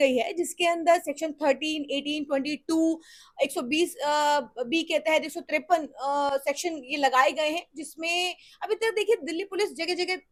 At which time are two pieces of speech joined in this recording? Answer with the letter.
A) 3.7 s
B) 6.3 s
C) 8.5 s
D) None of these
D